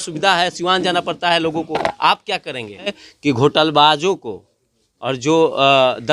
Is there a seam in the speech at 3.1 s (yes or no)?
yes